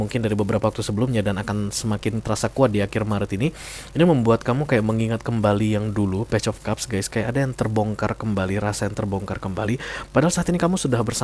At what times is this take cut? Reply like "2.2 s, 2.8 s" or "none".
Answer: none